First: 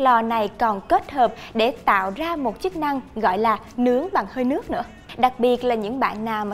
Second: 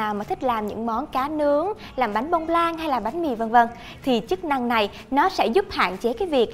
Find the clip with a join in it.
first; 1 cut; at 5.0 s

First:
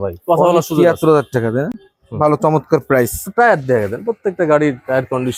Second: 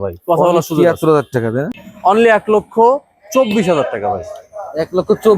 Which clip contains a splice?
second; 1 cut; at 1.9 s

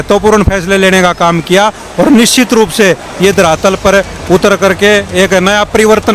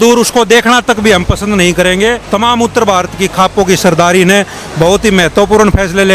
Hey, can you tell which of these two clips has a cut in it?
second; 1 cut; at 2.2 s

